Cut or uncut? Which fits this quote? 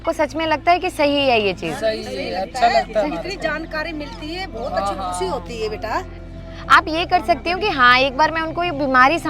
cut